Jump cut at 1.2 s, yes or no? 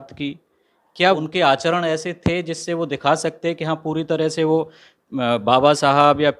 yes